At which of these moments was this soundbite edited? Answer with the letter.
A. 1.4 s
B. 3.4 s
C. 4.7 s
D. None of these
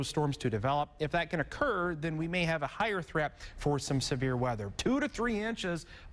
C